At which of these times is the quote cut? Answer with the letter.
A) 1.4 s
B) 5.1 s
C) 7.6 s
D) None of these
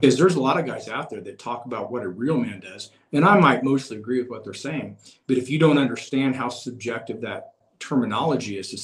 C